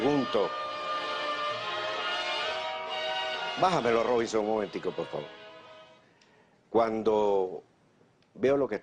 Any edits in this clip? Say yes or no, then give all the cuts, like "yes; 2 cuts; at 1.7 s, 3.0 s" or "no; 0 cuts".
yes; 1 cut; at 2.0 s